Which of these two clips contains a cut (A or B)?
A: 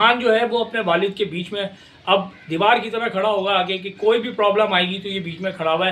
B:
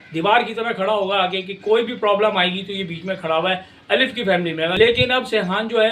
B